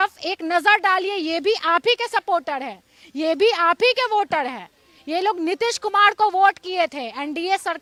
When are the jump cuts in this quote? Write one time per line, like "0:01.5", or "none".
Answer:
none